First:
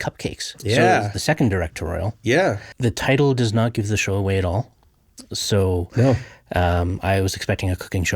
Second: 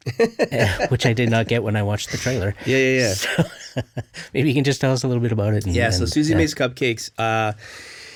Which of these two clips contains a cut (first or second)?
first